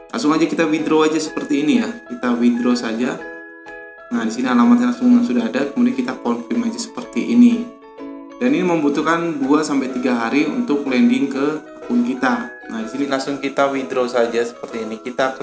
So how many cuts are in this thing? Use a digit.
1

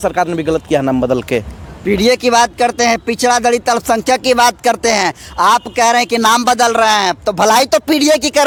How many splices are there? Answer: 0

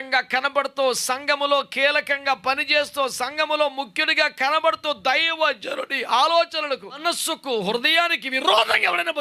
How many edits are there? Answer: 1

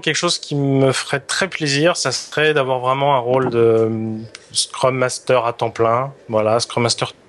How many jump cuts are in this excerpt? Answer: 0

